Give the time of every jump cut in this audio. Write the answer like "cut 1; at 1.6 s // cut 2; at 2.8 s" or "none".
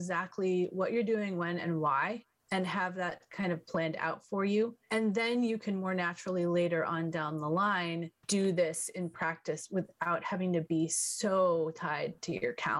cut 1; at 2.3 s // cut 2; at 4.8 s // cut 3; at 8.2 s